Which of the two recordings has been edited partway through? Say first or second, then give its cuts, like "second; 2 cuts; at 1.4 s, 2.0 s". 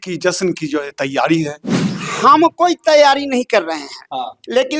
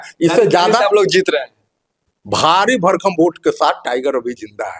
first; 1 cut; at 1.7 s